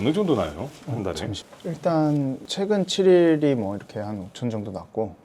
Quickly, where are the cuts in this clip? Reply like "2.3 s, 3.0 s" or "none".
1.3 s